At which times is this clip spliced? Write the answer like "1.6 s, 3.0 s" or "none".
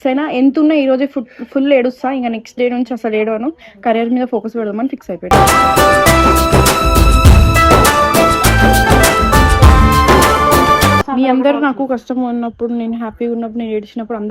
11.1 s

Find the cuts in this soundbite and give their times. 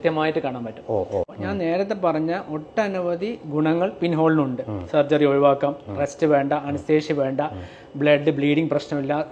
1.3 s

